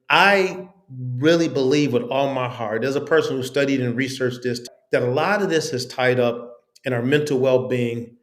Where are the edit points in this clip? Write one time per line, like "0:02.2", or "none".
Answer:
0:04.6